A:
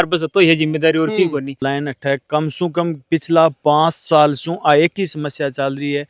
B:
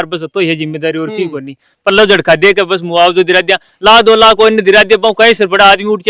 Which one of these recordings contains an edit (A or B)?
A